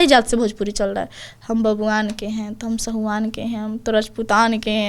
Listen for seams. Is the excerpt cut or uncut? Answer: uncut